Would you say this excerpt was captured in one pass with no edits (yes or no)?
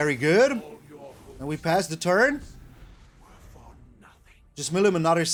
yes